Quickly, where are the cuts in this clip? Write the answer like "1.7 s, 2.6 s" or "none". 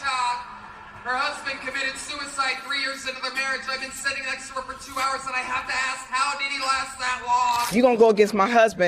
5.6 s, 7.7 s